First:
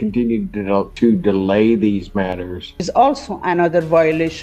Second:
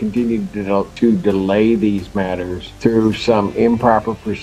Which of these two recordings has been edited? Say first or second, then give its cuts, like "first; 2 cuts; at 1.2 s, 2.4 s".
first; 1 cut; at 2.7 s